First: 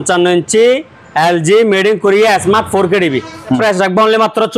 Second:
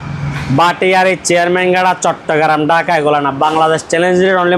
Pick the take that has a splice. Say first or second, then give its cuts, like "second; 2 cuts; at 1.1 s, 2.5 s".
first; 1 cut; at 3.6 s